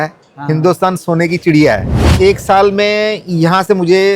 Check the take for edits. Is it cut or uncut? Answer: cut